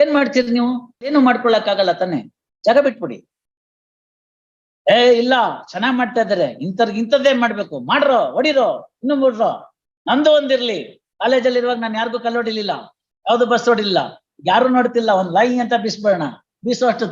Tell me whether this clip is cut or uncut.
cut